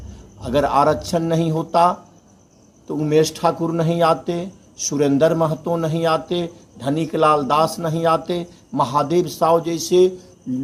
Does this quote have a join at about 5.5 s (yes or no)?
no